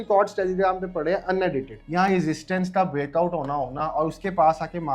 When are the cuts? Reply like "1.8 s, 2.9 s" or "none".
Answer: 1.8 s